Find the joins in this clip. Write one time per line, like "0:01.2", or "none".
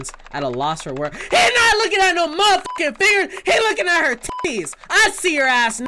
none

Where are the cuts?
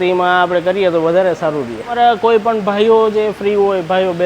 0:01.9

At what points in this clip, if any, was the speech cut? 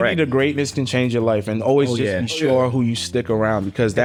none

